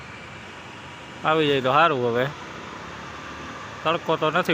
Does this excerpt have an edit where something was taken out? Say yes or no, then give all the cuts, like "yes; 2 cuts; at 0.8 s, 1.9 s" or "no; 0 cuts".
no; 0 cuts